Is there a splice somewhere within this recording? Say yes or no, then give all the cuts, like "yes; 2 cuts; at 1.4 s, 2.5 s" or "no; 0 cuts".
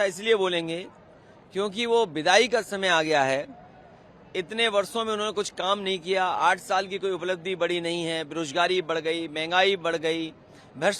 no; 0 cuts